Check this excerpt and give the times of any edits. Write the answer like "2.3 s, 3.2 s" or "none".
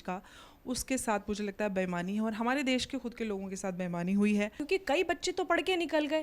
4.6 s